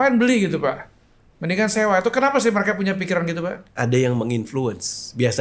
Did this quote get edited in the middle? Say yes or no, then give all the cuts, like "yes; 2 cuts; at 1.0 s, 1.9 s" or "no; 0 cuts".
yes; 1 cut; at 3.6 s